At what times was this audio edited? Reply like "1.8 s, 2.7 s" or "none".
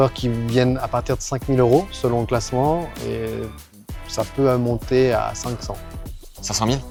none